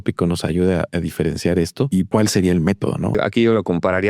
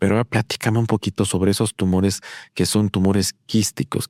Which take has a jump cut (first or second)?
first